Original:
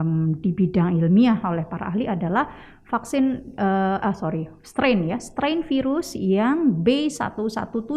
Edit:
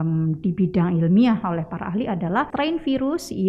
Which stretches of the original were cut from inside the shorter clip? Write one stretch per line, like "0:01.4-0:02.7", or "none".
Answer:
0:02.5-0:05.3